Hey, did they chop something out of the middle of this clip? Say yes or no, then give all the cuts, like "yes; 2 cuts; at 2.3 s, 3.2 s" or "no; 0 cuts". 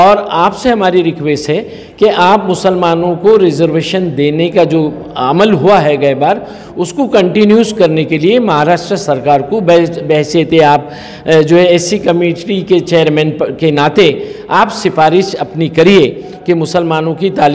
no; 0 cuts